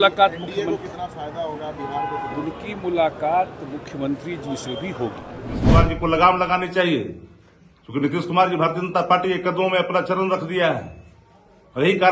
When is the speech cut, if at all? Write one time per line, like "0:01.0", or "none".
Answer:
0:05.6